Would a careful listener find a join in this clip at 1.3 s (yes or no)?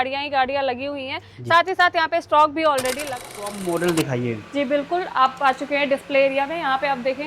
no